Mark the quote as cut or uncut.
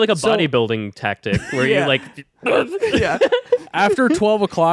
uncut